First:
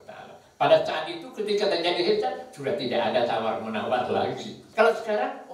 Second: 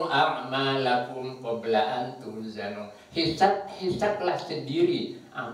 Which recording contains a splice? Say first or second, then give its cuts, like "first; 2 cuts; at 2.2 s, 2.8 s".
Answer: first; 1 cut; at 4.6 s